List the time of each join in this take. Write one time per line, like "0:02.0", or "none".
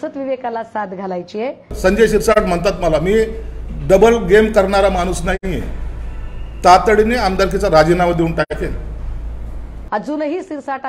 0:01.7
0:09.7